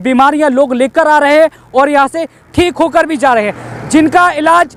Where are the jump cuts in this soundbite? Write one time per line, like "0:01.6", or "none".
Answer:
none